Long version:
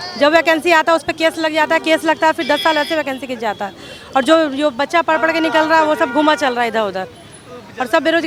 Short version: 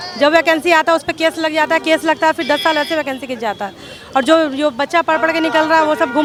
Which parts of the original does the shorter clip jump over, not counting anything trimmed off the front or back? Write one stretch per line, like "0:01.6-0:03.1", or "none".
none